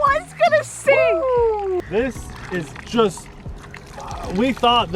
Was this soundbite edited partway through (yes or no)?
yes